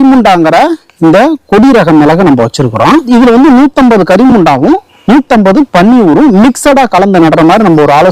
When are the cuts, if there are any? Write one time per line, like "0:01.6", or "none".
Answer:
0:03.1